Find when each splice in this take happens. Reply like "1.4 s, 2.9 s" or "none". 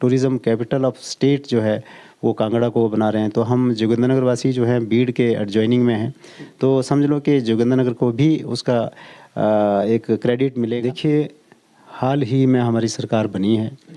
10.9 s